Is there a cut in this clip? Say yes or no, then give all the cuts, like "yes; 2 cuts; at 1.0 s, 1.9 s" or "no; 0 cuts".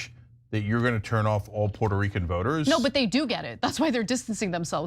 yes; 1 cut; at 2.6 s